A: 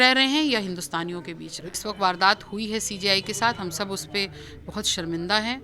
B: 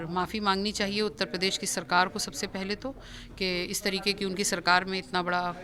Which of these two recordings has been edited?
A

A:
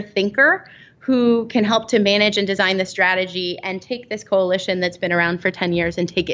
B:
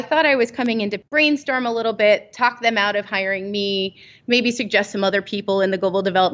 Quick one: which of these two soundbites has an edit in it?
B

